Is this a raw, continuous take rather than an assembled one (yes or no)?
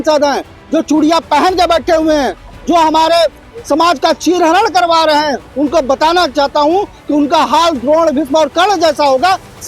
yes